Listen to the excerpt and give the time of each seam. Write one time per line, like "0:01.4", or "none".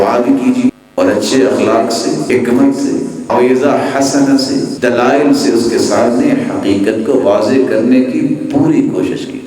0:00.7
0:02.2
0:03.3
0:04.7